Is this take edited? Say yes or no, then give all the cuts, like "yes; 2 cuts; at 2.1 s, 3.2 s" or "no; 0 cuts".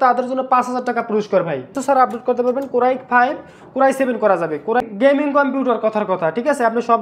yes; 2 cuts; at 1.8 s, 4.8 s